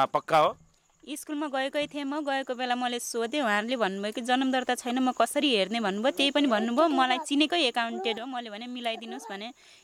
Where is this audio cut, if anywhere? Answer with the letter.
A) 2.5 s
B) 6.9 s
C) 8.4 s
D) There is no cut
D